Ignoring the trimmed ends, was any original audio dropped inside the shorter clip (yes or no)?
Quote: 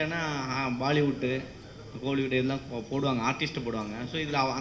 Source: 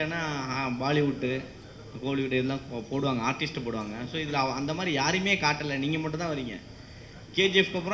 no